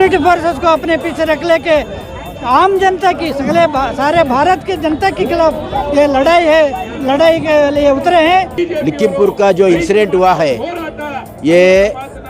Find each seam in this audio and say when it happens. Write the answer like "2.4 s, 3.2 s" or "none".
8.6 s